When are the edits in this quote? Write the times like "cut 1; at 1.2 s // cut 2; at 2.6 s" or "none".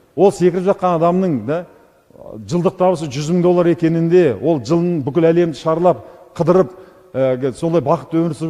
none